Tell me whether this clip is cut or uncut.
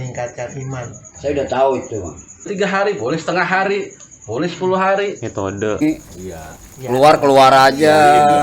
cut